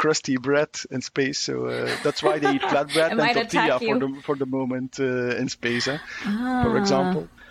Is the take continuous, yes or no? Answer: yes